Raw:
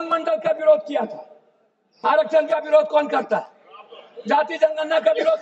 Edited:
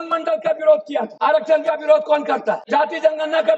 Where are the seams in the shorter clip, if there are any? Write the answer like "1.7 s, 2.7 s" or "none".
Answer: 1.1 s, 2.6 s